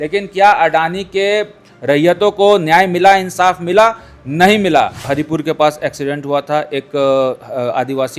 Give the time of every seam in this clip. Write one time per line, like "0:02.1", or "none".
0:05.1